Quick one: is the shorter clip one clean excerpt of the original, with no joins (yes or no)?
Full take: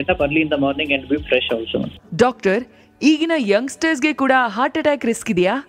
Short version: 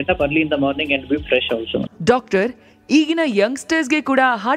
no